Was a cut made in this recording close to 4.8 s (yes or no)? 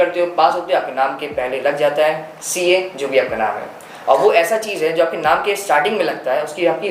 no